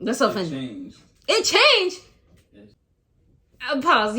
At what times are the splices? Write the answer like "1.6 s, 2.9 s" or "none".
2.7 s